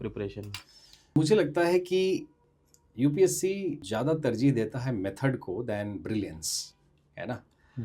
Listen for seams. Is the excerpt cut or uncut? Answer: cut